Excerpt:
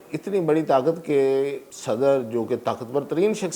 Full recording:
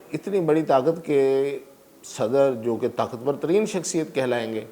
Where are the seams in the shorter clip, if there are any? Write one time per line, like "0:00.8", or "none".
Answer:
0:01.7